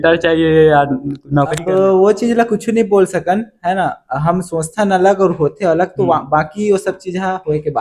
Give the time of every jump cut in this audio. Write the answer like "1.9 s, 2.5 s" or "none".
1.6 s